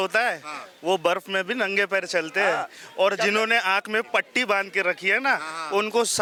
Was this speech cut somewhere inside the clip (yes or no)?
no